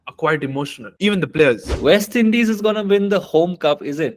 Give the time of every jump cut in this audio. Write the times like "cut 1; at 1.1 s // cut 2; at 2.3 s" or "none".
cut 1; at 1.7 s